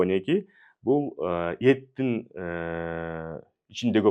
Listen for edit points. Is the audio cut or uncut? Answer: uncut